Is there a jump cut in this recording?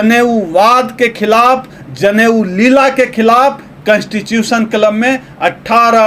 no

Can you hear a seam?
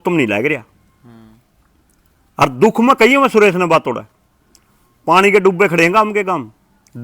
no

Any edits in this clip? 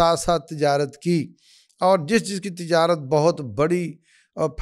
no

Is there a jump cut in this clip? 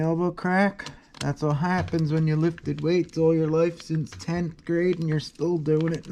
no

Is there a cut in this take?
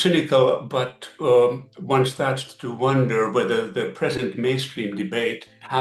no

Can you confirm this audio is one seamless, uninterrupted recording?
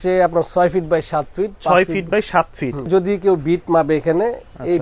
no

